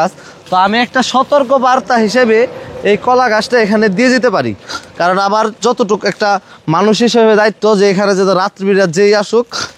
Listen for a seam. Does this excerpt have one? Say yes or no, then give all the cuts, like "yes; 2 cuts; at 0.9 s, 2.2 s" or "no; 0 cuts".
no; 0 cuts